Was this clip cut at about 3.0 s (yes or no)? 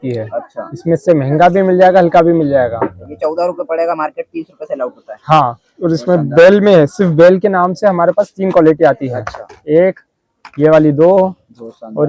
no